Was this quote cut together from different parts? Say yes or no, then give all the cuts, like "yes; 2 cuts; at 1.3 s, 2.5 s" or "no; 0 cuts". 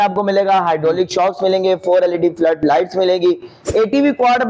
yes; 1 cut; at 3.5 s